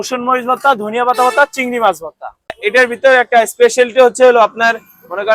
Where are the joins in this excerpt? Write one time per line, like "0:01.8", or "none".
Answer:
0:02.6